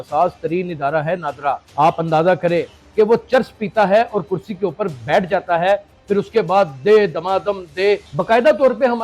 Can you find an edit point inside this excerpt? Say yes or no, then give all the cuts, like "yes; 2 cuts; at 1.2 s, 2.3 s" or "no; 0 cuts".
yes; 3 cuts; at 1.6 s, 2.8 s, 8.1 s